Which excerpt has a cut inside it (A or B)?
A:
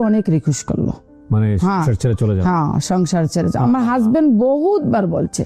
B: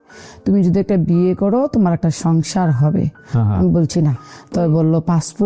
B